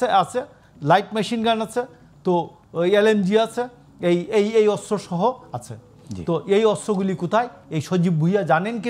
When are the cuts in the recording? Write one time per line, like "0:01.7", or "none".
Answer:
none